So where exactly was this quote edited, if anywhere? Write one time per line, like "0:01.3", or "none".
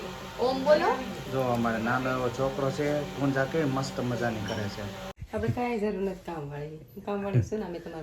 0:05.1